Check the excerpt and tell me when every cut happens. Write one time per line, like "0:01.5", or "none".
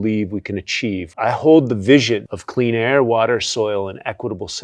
0:01.1
0:02.4